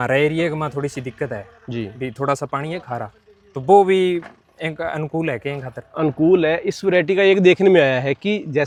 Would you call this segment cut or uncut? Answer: uncut